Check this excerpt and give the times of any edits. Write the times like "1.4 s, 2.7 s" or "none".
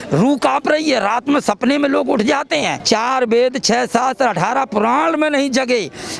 2.8 s